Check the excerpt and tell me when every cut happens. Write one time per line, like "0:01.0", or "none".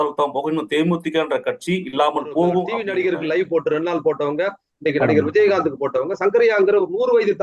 0:02.8

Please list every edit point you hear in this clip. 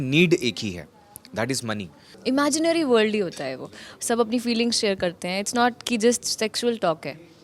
0:02.0

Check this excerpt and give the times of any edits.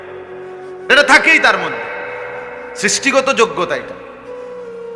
0:00.9

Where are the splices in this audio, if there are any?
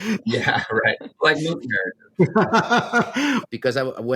0:01.1
0:03.4

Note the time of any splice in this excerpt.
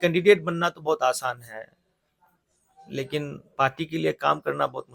none

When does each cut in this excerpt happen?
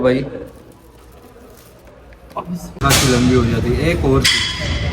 0:02.7

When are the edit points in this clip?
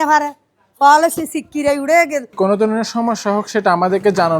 0:02.4

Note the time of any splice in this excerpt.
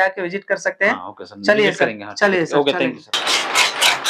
0:03.2

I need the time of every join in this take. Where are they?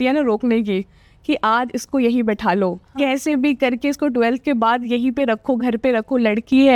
none

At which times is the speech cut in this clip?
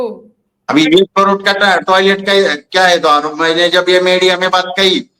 none

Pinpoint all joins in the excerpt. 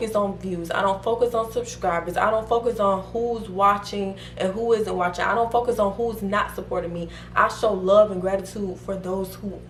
none

